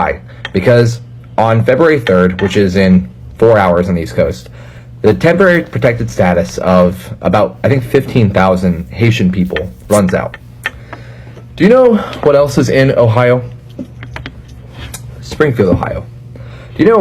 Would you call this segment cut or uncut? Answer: cut